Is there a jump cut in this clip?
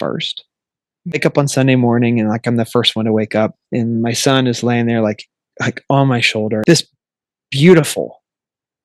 yes; 2 cuts; at 1.1 s, 6.6 s

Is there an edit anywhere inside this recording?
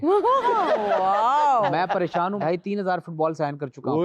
yes; 1 cut; at 2.4 s

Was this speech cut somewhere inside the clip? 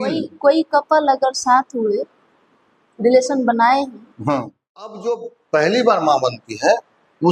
yes; 1 cut; at 4.9 s

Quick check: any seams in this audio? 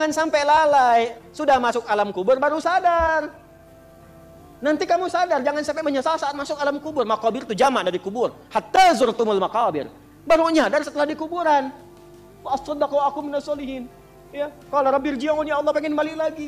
no; 0 cuts

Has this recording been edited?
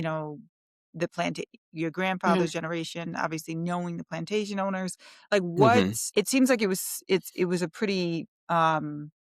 yes; 1 cut; at 6.0 s

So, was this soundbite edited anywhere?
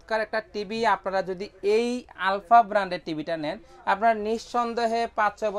no; 0 cuts

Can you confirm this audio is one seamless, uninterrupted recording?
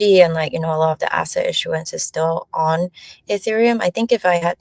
yes; 0 cuts

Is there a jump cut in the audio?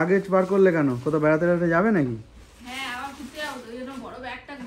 no; 0 cuts

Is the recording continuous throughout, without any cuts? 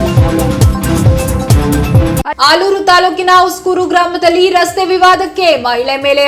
no; 1 cut; at 2.3 s

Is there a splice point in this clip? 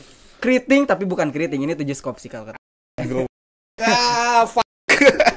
no; 0 cuts

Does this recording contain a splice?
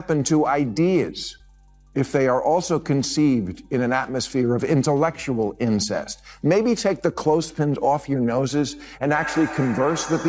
no; 0 cuts

